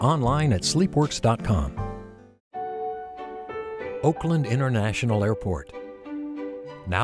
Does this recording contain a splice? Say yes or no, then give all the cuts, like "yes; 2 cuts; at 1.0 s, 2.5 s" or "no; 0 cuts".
yes; 1 cut; at 2.7 s